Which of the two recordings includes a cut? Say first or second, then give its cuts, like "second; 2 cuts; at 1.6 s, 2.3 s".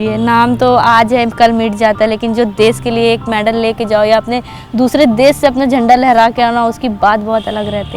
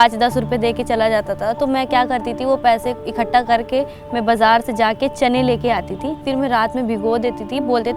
second; 1 cut; at 6.2 s